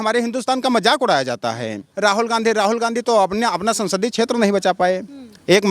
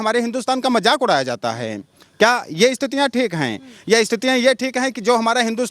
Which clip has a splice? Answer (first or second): first